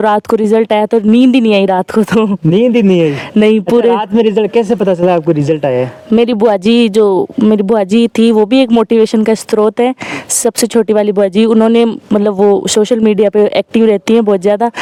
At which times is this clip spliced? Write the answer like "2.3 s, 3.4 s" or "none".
none